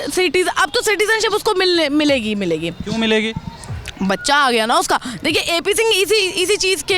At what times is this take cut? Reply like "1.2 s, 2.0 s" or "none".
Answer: none